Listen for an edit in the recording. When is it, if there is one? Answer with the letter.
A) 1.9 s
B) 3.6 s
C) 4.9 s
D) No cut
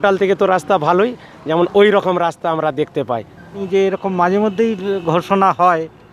B